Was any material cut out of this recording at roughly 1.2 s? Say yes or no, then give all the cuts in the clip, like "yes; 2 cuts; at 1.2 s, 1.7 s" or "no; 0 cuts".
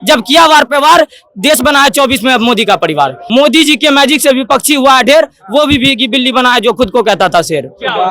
no; 1 cut; at 3.2 s